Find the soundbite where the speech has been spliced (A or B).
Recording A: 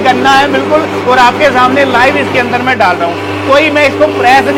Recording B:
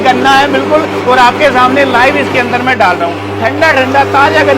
B